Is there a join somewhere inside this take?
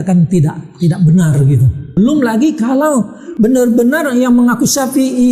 yes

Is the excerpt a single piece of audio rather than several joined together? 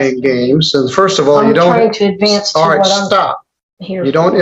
yes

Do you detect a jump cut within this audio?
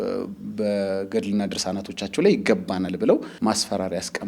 yes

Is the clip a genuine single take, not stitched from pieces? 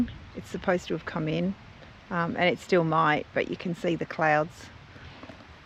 yes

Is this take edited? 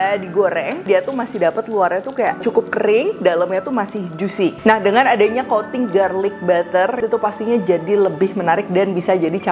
yes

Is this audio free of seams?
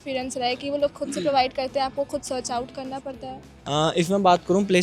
yes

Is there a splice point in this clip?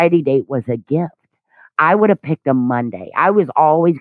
no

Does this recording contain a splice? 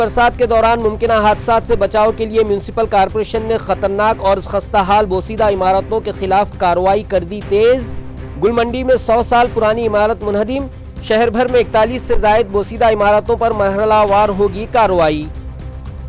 no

